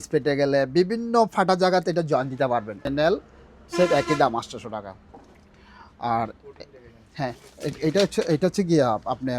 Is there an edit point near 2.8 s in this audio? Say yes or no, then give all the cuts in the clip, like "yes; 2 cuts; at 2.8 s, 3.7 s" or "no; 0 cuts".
yes; 1 cut; at 2.8 s